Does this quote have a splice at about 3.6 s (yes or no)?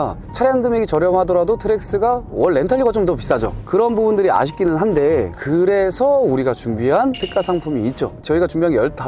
no